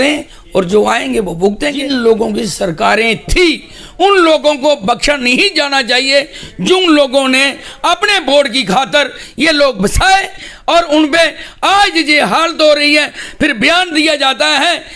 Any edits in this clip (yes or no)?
yes